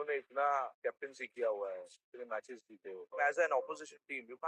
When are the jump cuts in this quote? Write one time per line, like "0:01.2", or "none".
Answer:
0:00.8
0:03.1